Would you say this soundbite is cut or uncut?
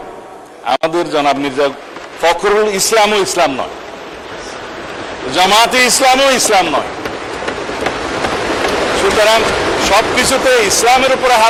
uncut